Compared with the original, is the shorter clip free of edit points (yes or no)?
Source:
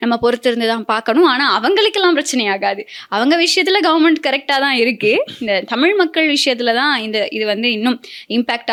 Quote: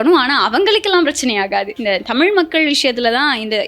no